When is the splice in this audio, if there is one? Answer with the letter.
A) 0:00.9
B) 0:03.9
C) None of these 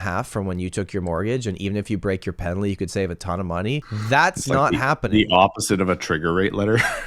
B